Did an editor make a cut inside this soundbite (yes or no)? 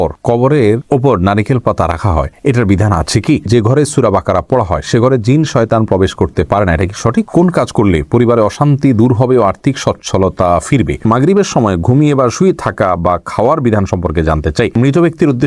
yes